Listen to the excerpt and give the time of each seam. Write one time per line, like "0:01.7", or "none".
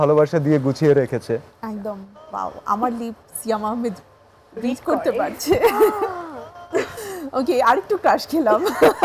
0:02.1